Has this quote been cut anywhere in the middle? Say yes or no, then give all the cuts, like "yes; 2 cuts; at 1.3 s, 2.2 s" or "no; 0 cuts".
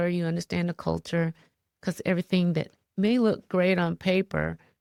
no; 0 cuts